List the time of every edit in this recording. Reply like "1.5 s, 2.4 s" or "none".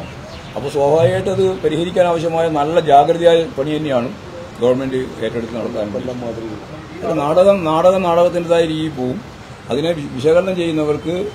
6.8 s